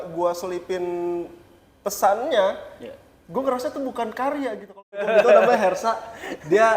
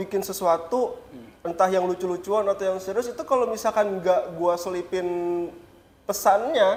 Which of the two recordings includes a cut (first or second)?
first